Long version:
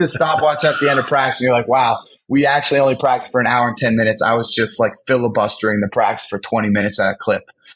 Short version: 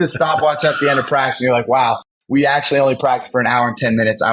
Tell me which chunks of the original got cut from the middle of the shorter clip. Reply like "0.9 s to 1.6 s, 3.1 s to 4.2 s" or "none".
none